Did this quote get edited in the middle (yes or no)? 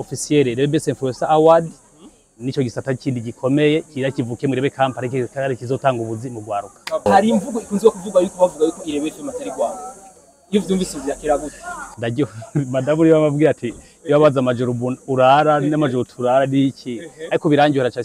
yes